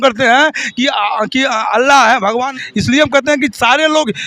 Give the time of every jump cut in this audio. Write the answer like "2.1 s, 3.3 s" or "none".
2.5 s